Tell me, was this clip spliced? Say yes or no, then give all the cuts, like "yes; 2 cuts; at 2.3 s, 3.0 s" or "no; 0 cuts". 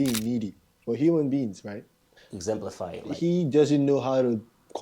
yes; 1 cut; at 1.9 s